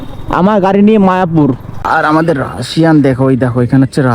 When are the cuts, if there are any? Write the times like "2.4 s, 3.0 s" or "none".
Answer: 1.7 s